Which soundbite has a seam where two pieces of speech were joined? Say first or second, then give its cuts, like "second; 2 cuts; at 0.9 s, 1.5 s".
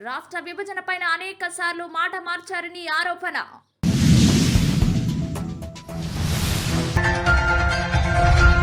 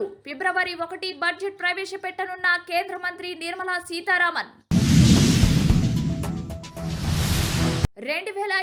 first; 2 cuts; at 3.6 s, 6.9 s